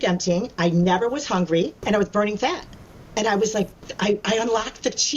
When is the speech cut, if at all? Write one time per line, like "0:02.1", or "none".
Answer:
0:01.8